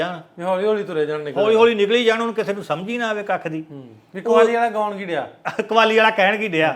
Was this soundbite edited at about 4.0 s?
no; 0 cuts

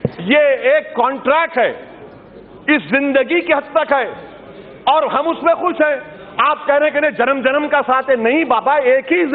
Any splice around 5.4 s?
no; 0 cuts

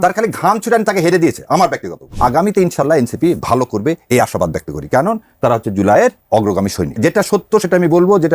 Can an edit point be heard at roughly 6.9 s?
yes; 2 cuts; at 2.1 s, 6.9 s

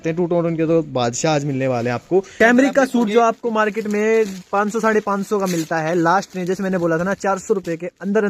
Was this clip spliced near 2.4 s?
yes; 1 cut; at 2.4 s

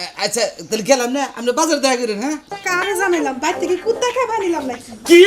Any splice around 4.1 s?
no; 1 cut; at 2.6 s

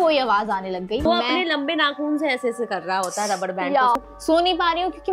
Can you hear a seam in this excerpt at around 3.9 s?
yes; 2 cuts; at 1.1 s, 3.9 s

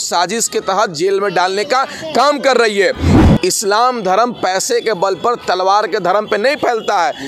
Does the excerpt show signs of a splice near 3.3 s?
yes; 1 cut; at 3.3 s

